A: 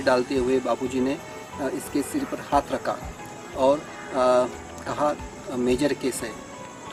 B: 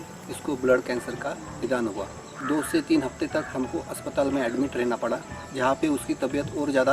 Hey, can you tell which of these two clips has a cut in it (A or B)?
B